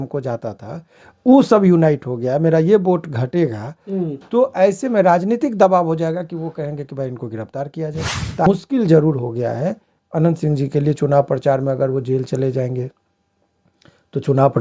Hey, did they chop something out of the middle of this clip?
yes; 1 cut; at 8.5 s

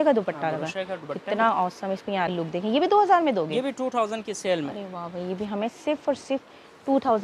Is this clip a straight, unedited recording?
no; 1 cut; at 2.3 s

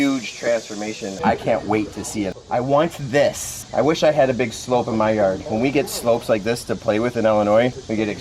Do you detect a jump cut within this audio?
yes; 2 cuts; at 1.2 s, 2.4 s

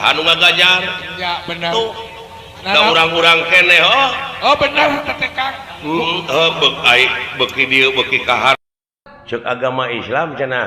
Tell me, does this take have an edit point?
yes; 1 cut; at 8.5 s

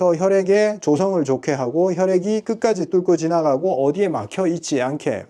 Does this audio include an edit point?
no; 0 cuts

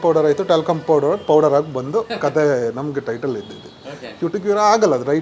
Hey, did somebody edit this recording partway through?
no; 0 cuts

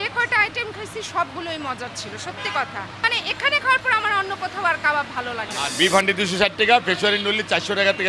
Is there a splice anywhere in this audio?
yes; 2 cuts; at 3.0 s, 5.7 s

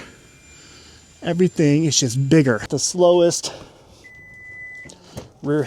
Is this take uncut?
no; 1 cut; at 2.8 s

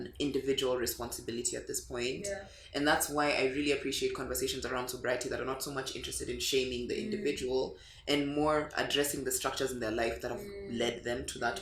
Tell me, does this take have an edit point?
no; 0 cuts

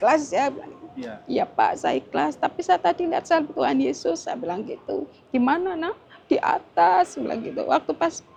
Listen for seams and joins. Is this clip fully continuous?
yes; 0 cuts

